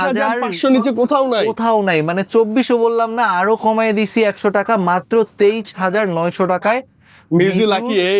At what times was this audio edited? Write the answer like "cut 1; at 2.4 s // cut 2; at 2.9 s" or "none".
none